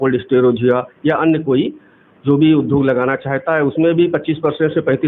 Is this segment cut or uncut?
uncut